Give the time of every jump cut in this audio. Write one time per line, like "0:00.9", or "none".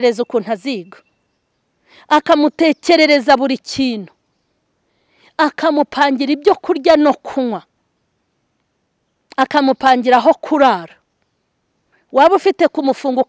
none